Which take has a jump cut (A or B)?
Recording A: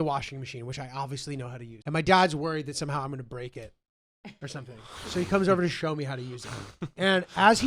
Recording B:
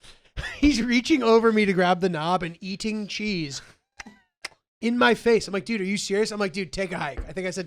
A